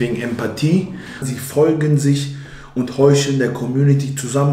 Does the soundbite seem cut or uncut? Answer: cut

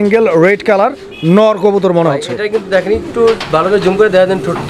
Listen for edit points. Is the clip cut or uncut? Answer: uncut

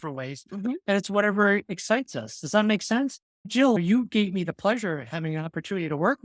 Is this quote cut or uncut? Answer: uncut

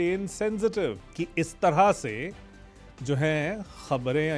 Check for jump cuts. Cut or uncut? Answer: cut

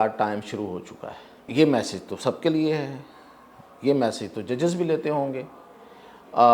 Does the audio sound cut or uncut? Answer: cut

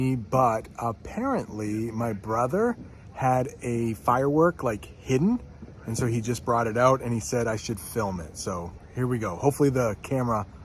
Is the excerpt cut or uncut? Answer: uncut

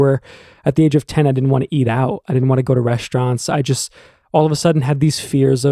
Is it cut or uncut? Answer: uncut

